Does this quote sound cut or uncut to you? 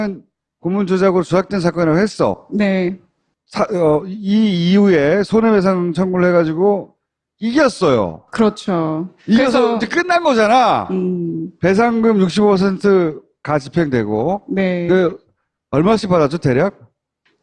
cut